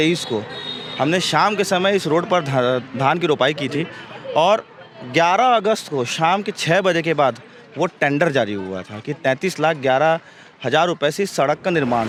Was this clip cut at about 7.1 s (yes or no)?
no